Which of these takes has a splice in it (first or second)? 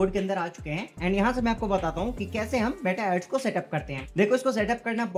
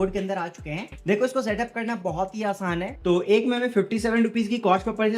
second